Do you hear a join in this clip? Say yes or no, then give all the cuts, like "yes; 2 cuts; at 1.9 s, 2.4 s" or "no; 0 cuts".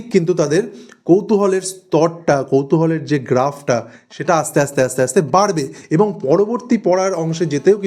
no; 0 cuts